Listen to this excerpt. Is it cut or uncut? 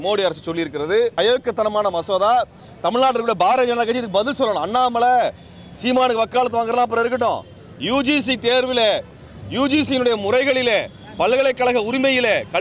cut